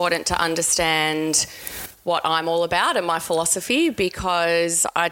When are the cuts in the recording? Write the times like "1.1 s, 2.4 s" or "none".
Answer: none